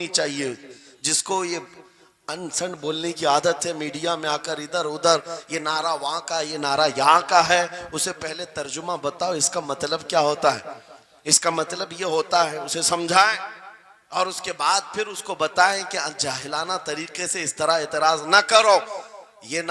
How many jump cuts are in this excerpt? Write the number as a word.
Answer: zero